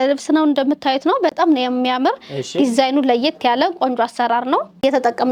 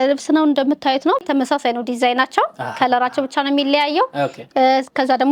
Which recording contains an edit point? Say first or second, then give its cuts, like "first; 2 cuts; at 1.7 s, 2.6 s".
second; 1 cut; at 1.2 s